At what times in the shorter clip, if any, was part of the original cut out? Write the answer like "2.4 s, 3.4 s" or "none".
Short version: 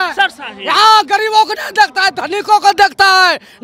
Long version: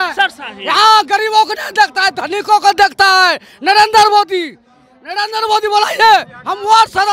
none